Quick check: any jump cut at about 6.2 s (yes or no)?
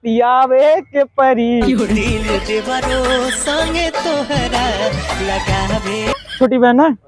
yes